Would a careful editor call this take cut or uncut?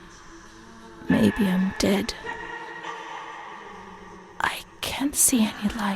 cut